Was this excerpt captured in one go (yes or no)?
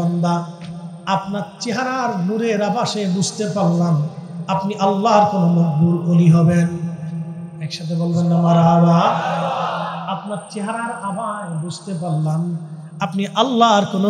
yes